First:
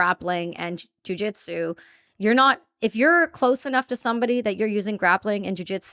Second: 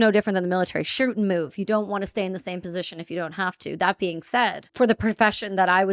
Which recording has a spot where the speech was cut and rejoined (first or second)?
second